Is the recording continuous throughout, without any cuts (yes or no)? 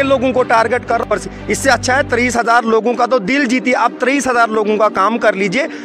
no